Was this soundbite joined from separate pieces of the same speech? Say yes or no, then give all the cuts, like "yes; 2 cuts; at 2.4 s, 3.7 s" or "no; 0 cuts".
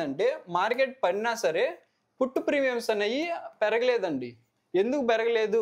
no; 0 cuts